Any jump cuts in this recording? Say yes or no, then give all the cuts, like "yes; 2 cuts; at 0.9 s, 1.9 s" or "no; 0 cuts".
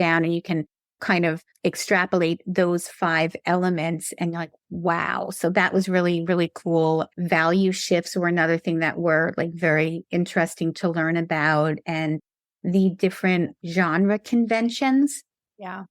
yes; 1 cut; at 1.0 s